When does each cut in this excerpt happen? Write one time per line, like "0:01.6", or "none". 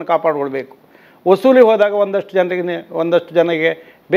none